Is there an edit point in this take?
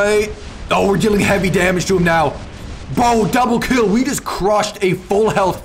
no; 0 cuts

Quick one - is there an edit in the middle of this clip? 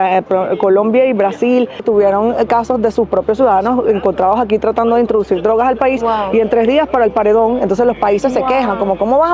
yes; 1 cut; at 1.8 s

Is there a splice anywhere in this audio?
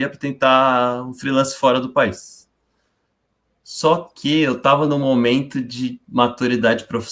no; 0 cuts

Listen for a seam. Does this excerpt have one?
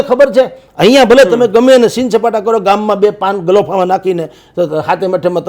no; 0 cuts

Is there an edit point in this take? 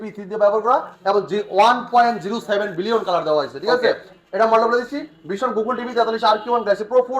no; 0 cuts

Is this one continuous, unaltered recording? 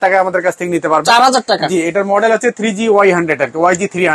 yes; 0 cuts

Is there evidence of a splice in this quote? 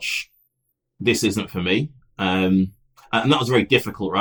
no; 0 cuts

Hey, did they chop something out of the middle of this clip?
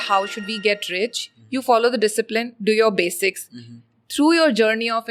no; 0 cuts

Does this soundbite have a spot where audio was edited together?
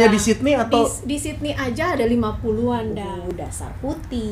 yes; 1 cut; at 3.3 s

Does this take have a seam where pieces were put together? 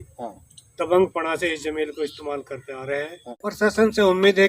yes; 1 cut; at 3.3 s

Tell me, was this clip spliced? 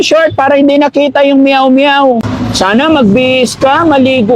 yes; 1 cut; at 2.3 s

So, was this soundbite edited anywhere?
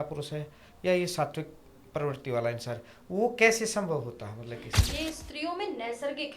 yes; 1 cut; at 4.7 s

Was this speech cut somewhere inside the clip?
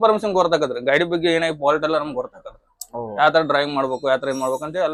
no; 0 cuts

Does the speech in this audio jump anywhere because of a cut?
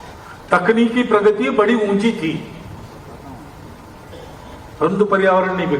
yes; 1 cut; at 2.8 s

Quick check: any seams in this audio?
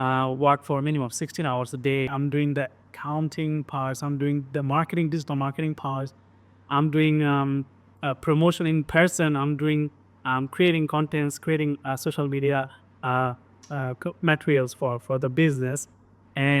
yes; 1 cut; at 2.1 s

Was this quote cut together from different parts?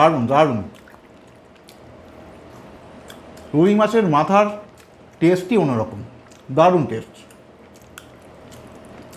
no; 0 cuts

